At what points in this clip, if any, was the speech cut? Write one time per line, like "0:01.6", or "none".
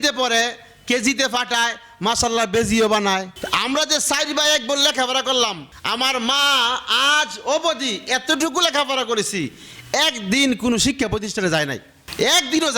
0:03.3

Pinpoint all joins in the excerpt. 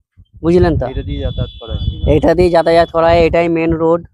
none

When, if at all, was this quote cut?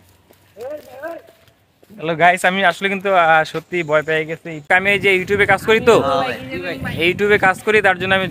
0:04.7

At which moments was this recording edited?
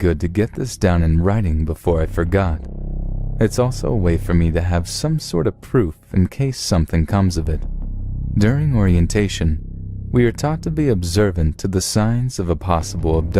0:02.8

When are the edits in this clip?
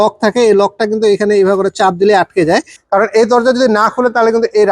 0:02.8

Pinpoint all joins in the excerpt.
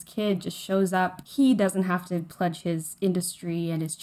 0:01.2

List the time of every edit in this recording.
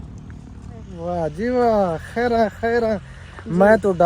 0:00.9

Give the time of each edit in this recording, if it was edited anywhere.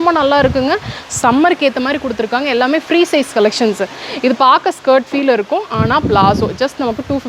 none

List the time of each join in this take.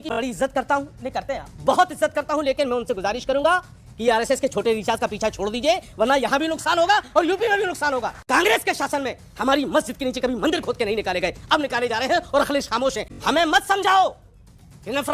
0:08.2
0:13.1

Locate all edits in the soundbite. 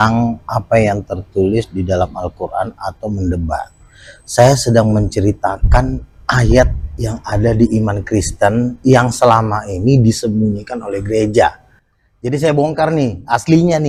none

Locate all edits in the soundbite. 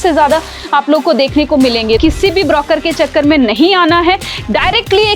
0:02.0

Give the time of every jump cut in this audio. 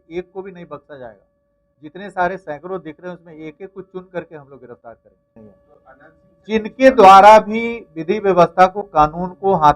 0:05.4

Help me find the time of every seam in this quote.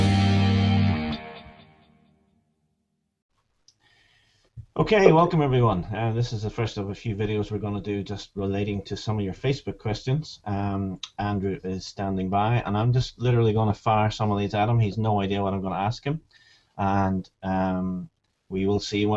none

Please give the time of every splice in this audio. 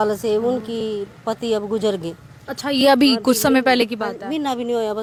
none

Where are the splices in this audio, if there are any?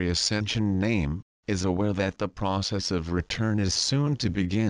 none

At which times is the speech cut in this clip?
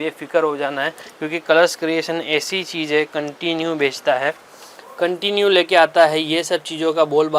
none

